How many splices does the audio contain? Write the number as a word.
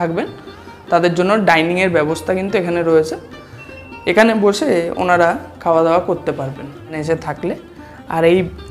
one